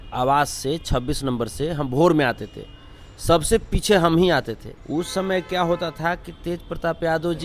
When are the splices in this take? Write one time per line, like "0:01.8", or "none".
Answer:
0:04.7